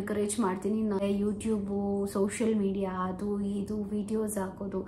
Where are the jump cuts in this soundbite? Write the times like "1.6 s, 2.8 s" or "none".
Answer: 1.0 s